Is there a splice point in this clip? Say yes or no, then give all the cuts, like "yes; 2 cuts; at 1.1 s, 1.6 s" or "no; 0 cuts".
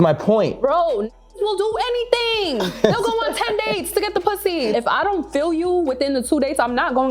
yes; 1 cut; at 4.7 s